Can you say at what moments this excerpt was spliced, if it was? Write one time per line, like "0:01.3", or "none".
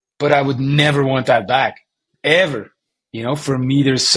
none

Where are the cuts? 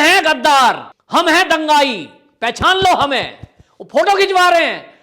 0:00.9

